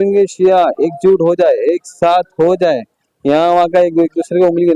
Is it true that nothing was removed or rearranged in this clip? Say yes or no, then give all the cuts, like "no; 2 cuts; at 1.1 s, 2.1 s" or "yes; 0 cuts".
yes; 0 cuts